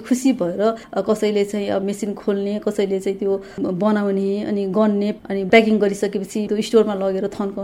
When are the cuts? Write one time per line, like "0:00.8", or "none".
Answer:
0:00.8
0:01.8
0:05.1
0:06.5

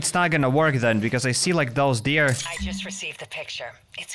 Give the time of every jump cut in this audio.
none

